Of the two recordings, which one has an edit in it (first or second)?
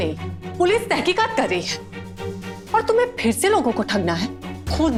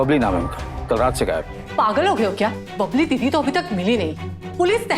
second